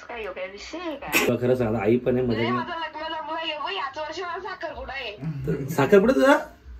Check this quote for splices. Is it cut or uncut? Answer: cut